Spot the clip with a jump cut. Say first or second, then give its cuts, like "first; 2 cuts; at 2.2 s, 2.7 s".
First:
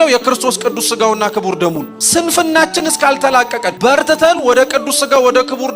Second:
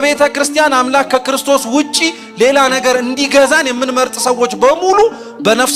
first; 2 cuts; at 1.9 s, 3.7 s